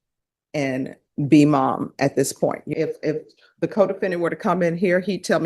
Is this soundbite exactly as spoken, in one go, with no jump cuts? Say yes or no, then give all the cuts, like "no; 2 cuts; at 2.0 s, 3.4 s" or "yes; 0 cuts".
no; 1 cut; at 2.6 s